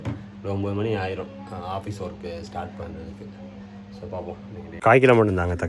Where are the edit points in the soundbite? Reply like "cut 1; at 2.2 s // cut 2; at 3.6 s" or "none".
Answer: cut 1; at 4.8 s

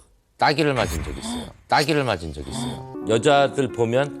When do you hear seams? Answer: cut 1; at 2.9 s

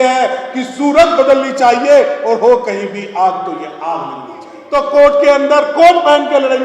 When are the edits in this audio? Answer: cut 1; at 4.5 s

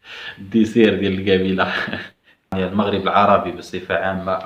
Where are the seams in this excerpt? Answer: cut 1; at 2.5 s

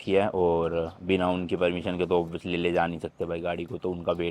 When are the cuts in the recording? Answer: none

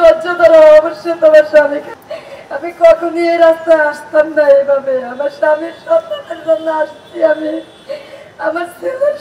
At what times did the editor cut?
cut 1; at 1.9 s

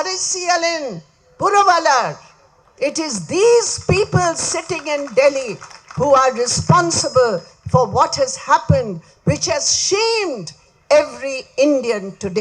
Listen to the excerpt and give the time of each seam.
none

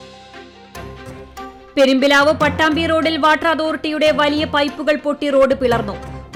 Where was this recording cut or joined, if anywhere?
none

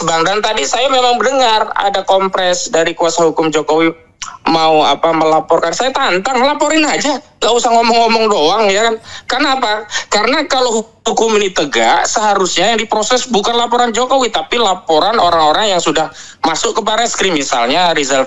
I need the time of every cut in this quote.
none

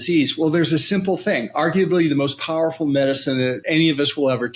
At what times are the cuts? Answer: cut 1; at 3.6 s

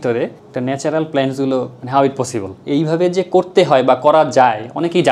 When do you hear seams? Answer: none

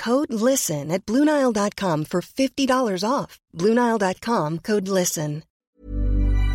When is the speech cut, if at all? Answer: cut 1; at 5.5 s

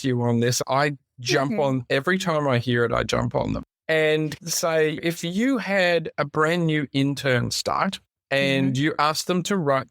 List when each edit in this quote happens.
cut 1; at 3.7 s // cut 2; at 8.1 s

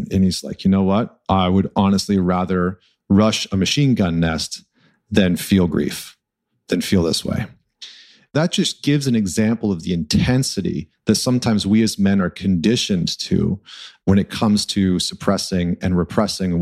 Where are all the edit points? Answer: cut 1; at 8.3 s

